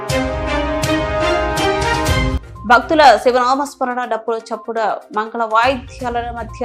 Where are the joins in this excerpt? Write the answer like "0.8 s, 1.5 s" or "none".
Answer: 2.4 s